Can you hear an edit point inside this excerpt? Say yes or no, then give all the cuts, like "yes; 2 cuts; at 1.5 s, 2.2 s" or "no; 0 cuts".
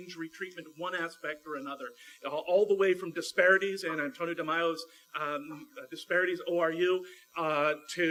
no; 0 cuts